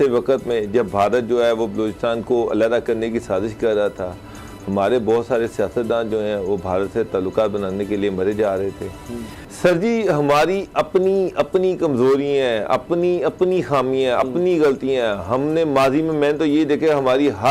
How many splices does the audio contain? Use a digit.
1